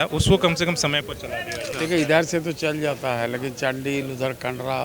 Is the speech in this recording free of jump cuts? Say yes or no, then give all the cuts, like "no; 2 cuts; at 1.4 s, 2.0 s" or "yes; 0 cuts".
no; 1 cut; at 1.8 s